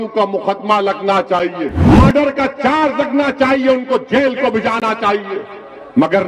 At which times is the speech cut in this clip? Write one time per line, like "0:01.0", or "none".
0:01.9